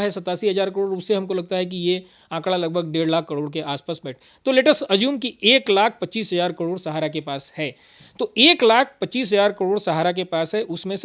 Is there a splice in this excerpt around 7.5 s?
no; 0 cuts

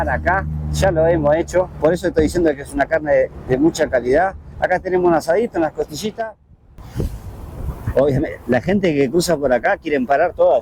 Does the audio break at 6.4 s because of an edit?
yes; 1 cut; at 6.4 s

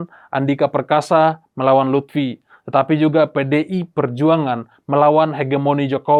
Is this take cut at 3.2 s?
no; 0 cuts

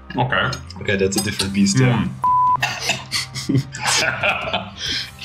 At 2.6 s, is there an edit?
yes; 1 cut; at 2.6 s

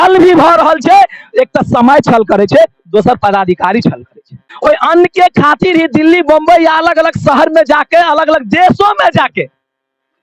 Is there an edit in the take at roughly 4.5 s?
yes; 1 cut; at 4.5 s

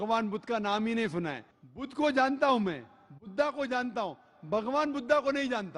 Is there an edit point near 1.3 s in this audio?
yes; 1 cut; at 1.3 s

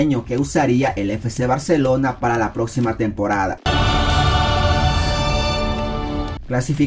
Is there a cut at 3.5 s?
yes; 1 cut; at 3.5 s

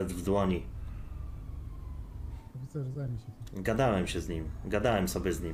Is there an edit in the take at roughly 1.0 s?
no; 0 cuts

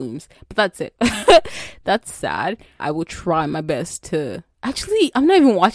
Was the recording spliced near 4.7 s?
no; 2 cuts; at 0.9 s, 2.8 s

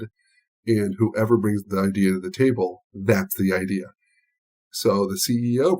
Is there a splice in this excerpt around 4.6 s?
yes; 1 cut; at 4.6 s

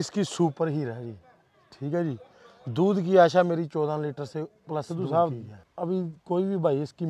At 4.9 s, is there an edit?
yes; 1 cut; at 4.9 s

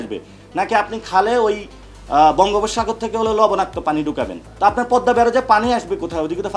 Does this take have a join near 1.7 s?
no; 1 cut; at 4.4 s

